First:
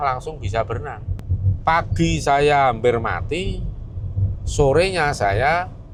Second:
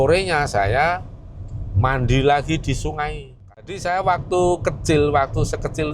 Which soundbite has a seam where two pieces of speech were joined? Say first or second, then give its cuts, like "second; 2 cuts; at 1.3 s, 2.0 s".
second; 1 cut; at 3.6 s